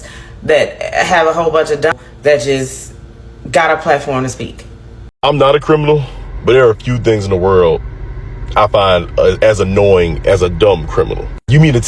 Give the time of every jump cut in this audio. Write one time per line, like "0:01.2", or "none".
0:01.9
0:05.1